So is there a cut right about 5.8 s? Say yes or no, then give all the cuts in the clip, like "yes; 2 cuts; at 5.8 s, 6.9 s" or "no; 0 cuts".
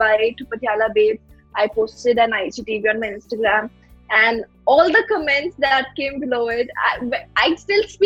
no; 0 cuts